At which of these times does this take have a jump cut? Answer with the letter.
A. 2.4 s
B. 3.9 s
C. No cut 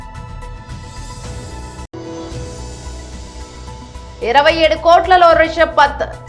C